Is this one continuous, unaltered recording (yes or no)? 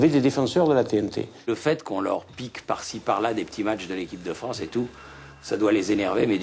no